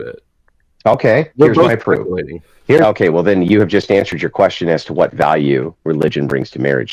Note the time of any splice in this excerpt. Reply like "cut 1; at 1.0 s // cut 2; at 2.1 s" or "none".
cut 1; at 2.8 s